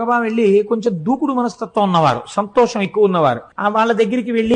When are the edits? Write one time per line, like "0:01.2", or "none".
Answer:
0:03.5